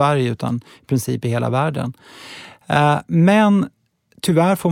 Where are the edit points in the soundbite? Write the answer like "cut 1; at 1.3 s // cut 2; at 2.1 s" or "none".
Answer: none